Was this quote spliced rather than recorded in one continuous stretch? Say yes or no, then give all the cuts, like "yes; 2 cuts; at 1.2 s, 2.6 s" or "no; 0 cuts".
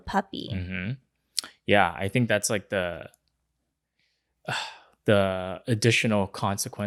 no; 0 cuts